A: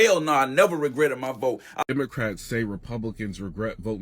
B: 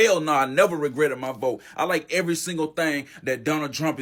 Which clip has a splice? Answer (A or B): A